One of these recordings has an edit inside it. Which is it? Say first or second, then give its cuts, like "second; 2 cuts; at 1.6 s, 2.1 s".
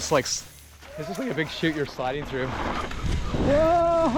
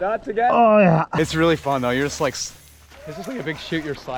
second; 1 cut; at 1.1 s